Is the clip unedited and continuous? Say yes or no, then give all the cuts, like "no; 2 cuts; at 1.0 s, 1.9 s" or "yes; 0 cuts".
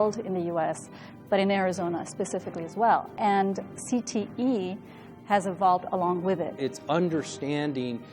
no; 1 cut; at 6.6 s